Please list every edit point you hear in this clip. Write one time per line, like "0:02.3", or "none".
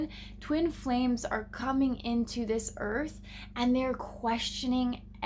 none